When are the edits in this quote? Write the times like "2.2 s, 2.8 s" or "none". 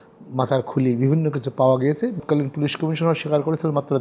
2.2 s